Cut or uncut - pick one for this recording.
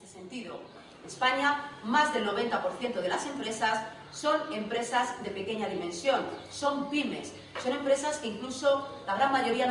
uncut